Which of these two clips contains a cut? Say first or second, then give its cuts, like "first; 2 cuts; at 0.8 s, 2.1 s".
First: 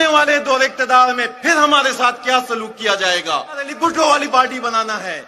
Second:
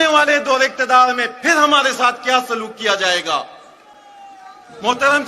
first; 1 cut; at 3.7 s